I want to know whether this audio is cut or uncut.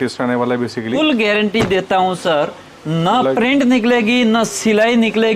cut